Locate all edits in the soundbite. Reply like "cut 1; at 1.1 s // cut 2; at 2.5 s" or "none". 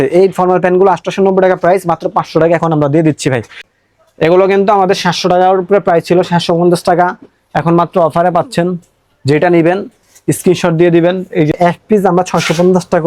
cut 1; at 3.5 s // cut 2; at 11.5 s